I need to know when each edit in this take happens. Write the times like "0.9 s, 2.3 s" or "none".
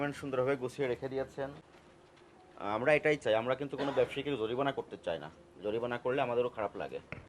1.6 s